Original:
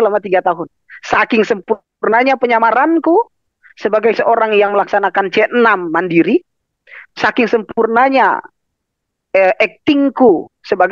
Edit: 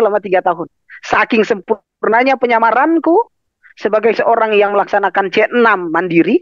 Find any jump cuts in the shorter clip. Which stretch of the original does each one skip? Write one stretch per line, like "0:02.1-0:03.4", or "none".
none